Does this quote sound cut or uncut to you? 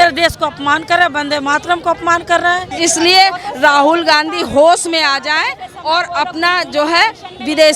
cut